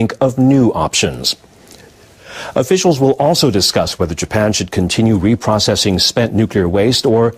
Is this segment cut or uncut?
cut